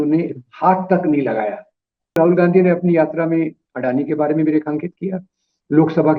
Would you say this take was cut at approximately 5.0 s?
no; 1 cut; at 2.1 s

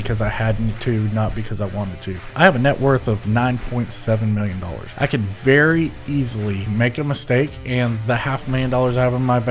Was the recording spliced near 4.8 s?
yes; 3 cuts; at 2.3 s, 4.8 s, 6.7 s

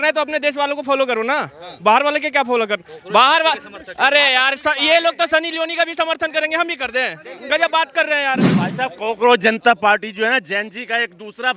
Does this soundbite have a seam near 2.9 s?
no; 1 cut; at 8.5 s

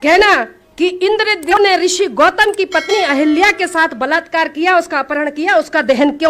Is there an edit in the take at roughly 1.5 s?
yes; 1 cut; at 1.5 s

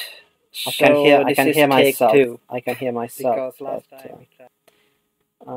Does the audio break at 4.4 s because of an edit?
no; 2 cuts; at 1.5 s, 2.8 s

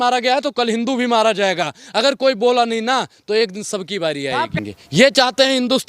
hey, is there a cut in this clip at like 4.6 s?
yes; 1 cut; at 4.6 s

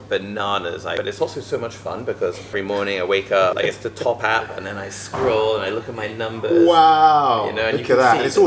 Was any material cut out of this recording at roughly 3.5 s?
yes; 3 cuts; at 0.9 s, 2.5 s, 3.5 s

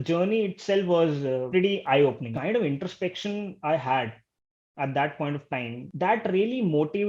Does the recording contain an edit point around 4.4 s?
no; 3 cuts; at 1.4 s, 2.3 s, 5.9 s

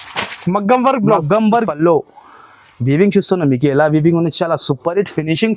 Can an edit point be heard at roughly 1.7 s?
yes; 1 cut; at 1.7 s

